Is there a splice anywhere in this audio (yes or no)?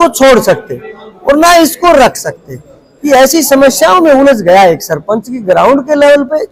no